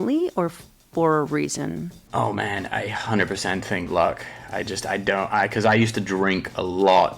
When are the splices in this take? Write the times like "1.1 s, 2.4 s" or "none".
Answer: 2.0 s

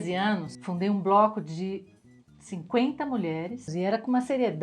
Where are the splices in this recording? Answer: 3.7 s

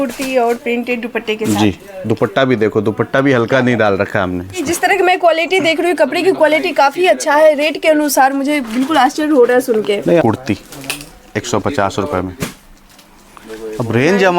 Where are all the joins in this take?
4.6 s, 10.2 s

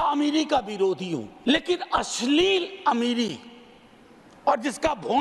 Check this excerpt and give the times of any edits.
1.3 s

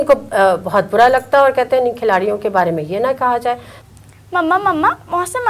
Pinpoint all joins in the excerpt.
3.7 s

